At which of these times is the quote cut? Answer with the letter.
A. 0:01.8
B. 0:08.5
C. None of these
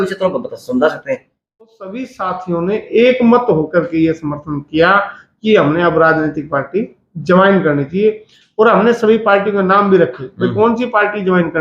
A